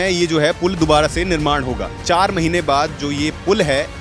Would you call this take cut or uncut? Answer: cut